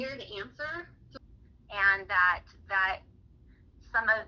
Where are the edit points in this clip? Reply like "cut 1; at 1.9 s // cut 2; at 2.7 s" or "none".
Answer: cut 1; at 1.1 s